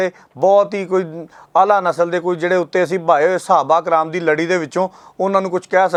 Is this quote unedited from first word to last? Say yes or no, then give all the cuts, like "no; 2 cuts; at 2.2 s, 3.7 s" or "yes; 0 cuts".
yes; 0 cuts